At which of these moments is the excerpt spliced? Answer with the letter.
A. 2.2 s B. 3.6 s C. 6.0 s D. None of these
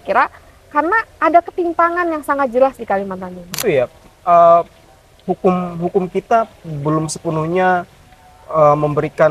B